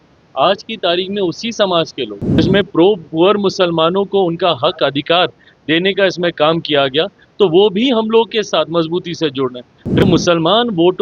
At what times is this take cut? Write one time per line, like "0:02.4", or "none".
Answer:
0:02.4
0:10.0